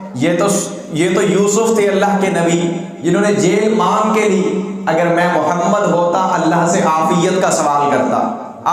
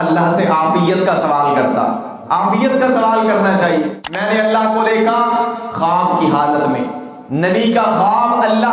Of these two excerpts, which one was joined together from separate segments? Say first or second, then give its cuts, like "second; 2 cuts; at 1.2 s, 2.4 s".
second; 1 cut; at 4.1 s